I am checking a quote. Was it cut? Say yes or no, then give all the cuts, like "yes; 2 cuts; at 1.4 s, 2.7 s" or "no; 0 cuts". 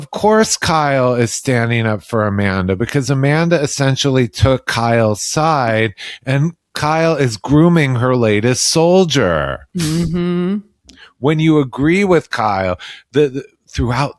no; 0 cuts